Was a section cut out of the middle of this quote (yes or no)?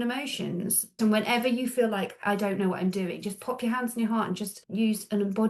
yes